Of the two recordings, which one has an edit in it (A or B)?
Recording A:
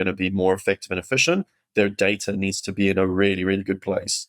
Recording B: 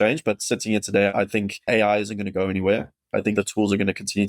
B